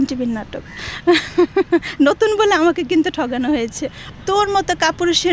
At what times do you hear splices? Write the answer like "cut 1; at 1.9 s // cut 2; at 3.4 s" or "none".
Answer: cut 1; at 4.1 s